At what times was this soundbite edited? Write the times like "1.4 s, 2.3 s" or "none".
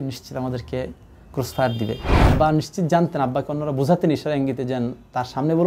2.1 s